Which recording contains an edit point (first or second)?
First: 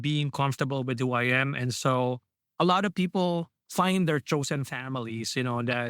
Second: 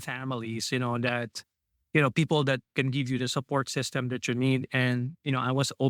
first